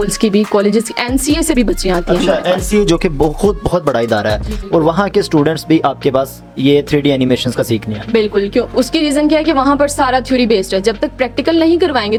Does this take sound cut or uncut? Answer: uncut